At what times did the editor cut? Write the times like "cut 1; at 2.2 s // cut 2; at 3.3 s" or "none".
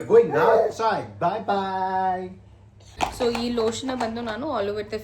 cut 1; at 2.8 s